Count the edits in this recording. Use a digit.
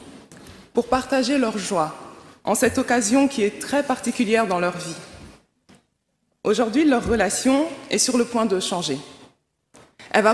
0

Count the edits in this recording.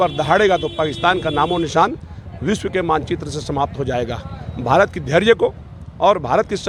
0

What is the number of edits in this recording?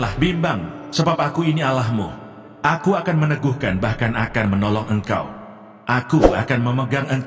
0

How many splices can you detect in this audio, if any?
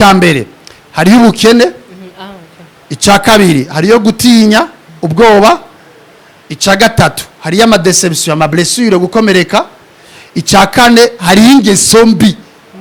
0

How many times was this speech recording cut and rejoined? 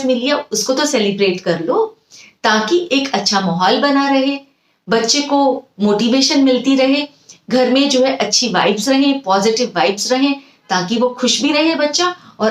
0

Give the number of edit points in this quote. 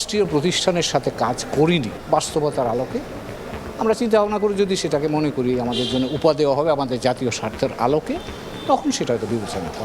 1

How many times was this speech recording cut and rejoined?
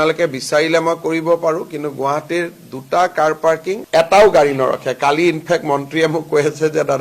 1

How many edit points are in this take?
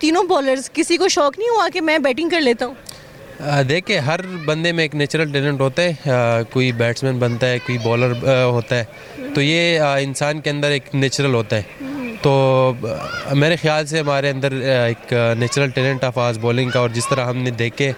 0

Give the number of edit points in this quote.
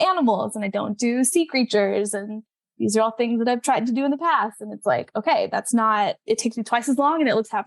1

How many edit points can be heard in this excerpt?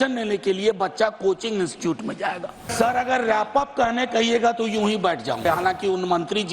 2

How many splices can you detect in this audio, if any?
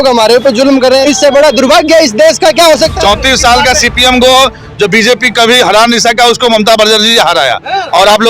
2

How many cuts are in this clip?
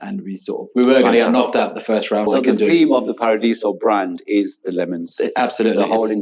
1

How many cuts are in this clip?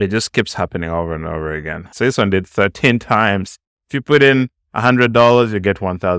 0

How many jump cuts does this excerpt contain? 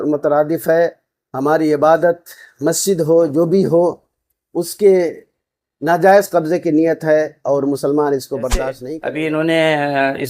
1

